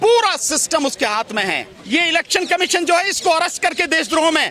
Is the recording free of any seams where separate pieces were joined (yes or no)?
no